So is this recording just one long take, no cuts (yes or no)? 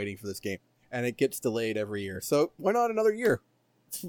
yes